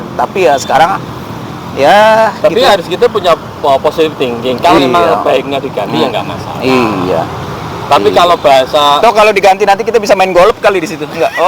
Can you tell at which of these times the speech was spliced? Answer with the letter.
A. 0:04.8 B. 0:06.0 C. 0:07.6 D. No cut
A